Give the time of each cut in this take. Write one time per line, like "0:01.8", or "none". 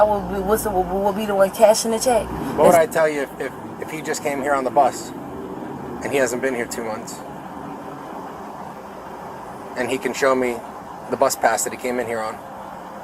0:02.4